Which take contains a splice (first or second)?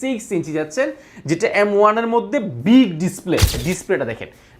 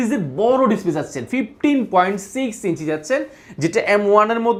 first